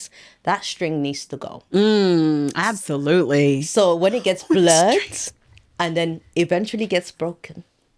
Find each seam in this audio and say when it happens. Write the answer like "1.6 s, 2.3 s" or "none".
none